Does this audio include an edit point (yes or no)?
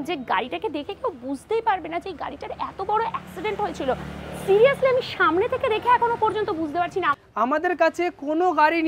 yes